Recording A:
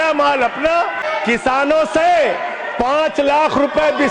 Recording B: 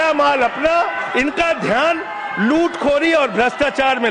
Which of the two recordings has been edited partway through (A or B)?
A